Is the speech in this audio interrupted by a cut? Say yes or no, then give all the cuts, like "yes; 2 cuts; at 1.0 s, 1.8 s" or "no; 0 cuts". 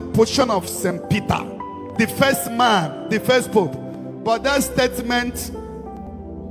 no; 0 cuts